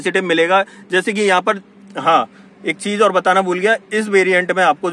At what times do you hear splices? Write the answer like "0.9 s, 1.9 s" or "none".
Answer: none